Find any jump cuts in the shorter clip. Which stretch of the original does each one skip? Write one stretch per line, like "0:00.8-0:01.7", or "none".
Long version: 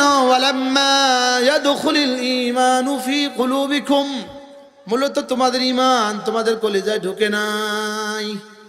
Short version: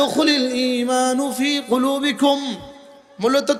none

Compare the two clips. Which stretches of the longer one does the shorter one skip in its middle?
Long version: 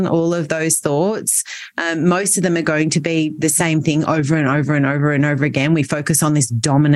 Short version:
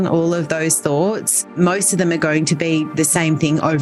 0:01.5-0:02.0

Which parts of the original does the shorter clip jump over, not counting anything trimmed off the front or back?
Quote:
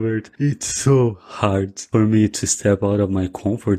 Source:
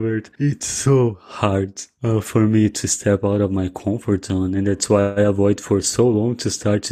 0:01.8-0:02.3

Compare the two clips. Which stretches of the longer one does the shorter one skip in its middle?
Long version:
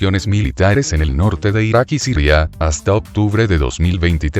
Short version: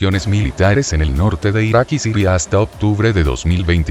0:02.1-0:02.5

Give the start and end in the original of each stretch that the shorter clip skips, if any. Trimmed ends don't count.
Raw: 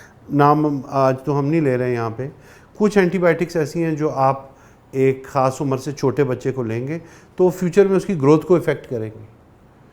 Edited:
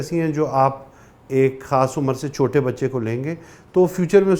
none

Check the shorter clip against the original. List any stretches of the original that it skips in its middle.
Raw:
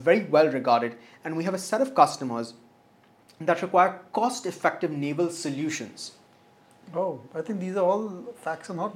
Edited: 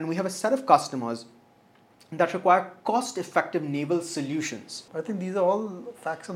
0:06.1-0:07.2

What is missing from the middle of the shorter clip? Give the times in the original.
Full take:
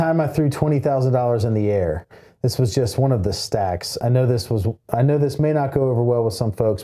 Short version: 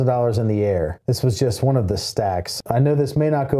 0:02.0-0:02.3
0:03.9-0:04.8

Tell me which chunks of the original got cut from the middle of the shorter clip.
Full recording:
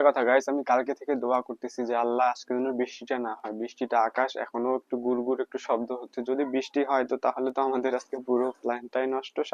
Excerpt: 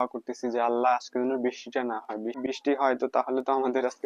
0:03.7-0:06.5

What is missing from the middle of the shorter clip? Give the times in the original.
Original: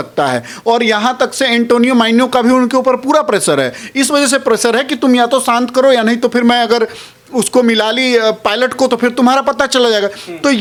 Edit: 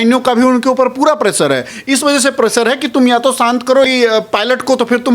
0:05.9-0:08.0

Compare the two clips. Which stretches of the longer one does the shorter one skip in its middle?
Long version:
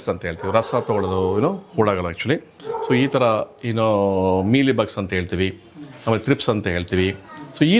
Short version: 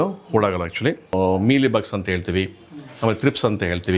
0:02.6-0:04.2

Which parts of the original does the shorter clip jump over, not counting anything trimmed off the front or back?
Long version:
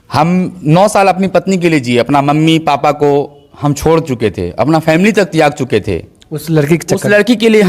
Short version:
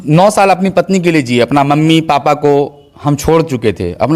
none

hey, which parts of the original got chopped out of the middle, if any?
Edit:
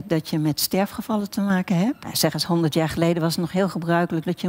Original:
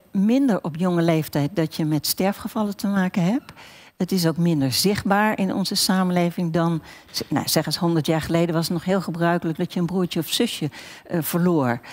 0:03.6-0:07.5

